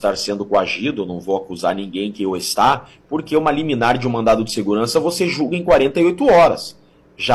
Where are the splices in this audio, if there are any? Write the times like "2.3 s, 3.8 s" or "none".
none